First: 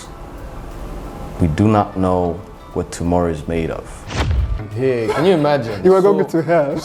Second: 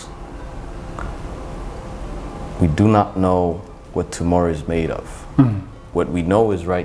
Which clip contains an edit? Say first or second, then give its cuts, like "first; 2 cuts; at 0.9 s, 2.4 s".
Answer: first; 2 cuts; at 0.8 s, 4.1 s